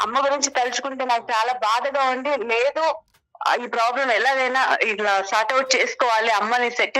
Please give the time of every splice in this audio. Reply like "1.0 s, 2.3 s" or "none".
none